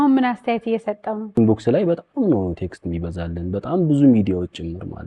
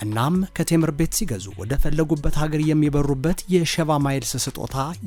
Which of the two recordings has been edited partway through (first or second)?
first